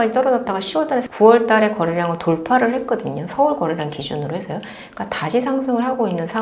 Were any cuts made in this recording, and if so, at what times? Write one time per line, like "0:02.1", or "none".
0:01.1